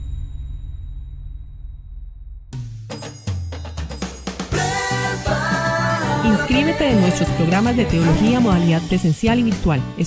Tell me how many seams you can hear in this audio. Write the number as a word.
one